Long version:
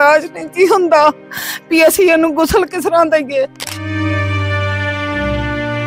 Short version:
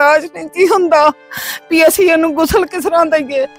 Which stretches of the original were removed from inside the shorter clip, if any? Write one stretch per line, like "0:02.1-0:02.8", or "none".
none